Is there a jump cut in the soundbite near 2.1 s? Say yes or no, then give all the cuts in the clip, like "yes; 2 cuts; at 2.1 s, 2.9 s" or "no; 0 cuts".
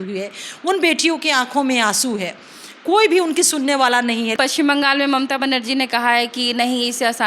no; 1 cut; at 4.3 s